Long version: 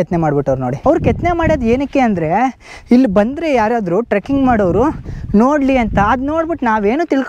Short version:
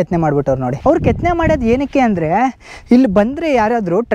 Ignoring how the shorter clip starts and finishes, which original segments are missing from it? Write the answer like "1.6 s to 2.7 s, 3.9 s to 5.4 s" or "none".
none